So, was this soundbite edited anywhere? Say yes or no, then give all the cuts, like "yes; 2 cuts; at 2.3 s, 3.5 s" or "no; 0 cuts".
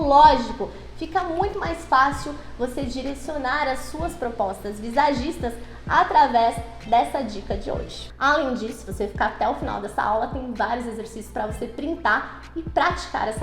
yes; 1 cut; at 8.0 s